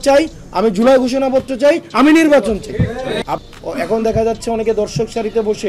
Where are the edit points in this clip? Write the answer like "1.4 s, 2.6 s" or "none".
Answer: 3.2 s

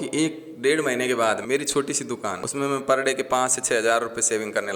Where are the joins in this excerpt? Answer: 1.4 s, 2.4 s

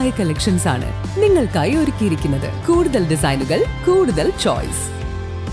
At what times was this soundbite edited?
2.5 s

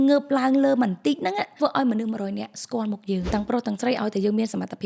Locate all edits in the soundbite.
1.5 s, 3.3 s

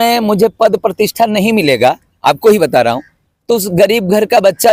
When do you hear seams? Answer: none

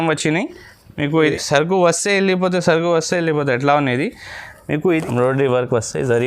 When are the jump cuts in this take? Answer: 1.2 s, 5.0 s

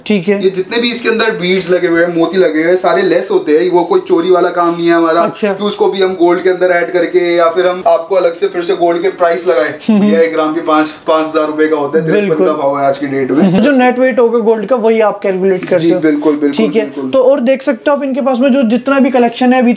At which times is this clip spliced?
none

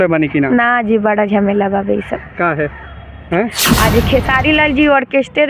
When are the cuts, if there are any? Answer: 3.7 s

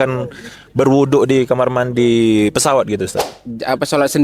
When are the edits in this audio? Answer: 3.3 s

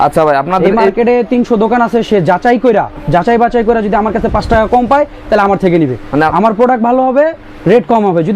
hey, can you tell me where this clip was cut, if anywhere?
none

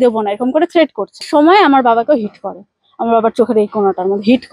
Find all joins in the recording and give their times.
1.3 s

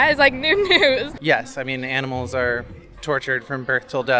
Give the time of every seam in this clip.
1.2 s

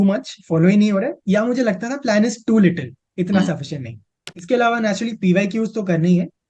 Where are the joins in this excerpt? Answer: 4.3 s

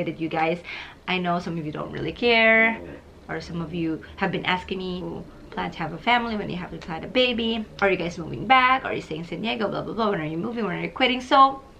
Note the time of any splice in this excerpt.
5.0 s, 7.7 s

